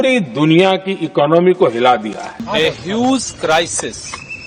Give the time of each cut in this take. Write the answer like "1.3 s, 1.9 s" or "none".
2.3 s